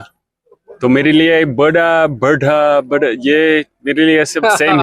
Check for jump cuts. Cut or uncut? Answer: uncut